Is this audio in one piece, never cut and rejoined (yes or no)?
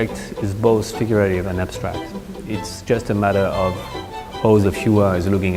yes